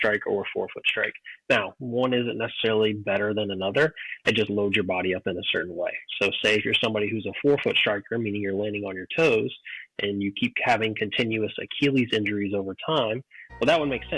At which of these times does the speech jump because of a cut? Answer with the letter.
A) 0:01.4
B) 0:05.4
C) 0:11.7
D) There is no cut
D